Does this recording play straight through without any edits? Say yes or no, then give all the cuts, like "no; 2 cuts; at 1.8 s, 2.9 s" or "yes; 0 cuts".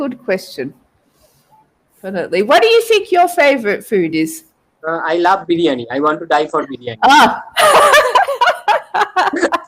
no; 1 cut; at 2.0 s